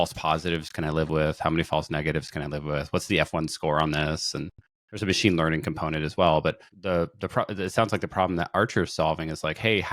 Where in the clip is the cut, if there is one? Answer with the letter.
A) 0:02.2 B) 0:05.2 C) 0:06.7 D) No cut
C